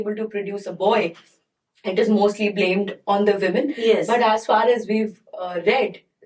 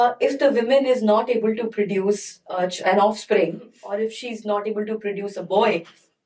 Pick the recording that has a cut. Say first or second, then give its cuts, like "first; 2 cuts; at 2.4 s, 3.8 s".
second; 1 cut; at 3.7 s